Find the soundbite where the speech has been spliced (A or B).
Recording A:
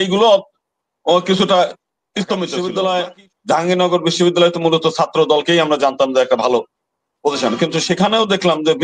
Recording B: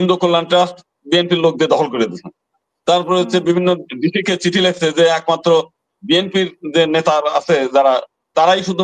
A